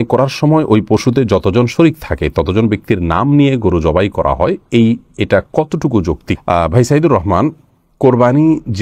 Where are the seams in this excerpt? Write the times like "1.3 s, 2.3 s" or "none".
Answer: none